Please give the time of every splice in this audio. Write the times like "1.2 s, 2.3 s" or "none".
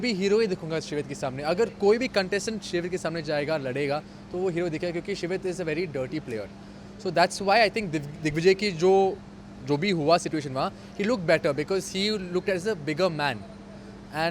none